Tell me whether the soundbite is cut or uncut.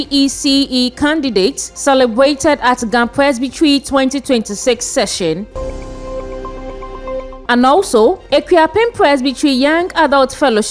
cut